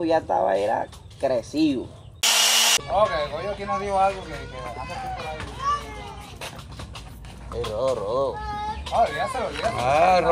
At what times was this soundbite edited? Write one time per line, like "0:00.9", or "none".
0:02.5